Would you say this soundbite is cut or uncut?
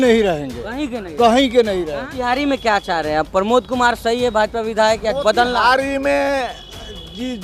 cut